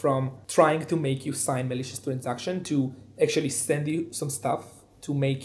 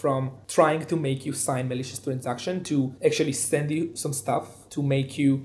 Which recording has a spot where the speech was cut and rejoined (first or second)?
second